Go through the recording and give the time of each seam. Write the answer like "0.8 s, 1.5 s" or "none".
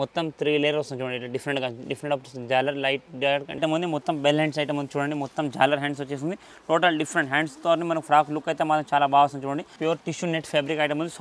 3.6 s, 9.7 s